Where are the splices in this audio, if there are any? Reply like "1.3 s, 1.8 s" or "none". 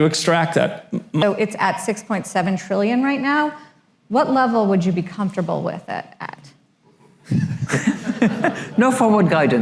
1.2 s